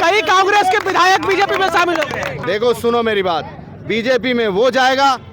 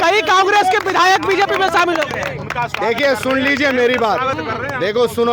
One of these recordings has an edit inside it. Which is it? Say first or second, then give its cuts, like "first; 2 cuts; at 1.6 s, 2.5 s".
first; 1 cut; at 2.4 s